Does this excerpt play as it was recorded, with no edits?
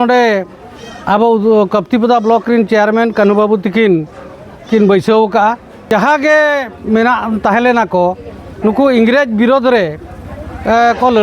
no; 1 cut; at 5.8 s

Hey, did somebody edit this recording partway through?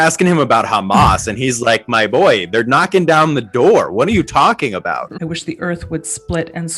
yes; 1 cut; at 5.2 s

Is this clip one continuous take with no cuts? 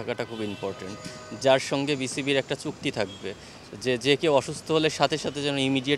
yes; 0 cuts

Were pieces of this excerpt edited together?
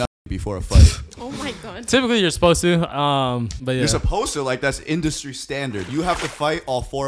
yes; 2 cuts; at 3.5 s, 5.9 s

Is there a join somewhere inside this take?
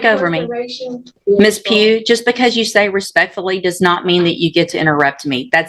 yes; 1 cut; at 1.2 s

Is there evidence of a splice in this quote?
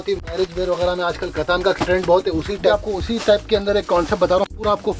yes; 1 cut; at 2.7 s

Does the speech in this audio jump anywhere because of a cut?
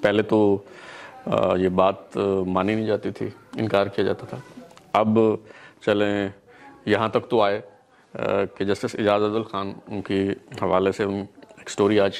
no; 0 cuts

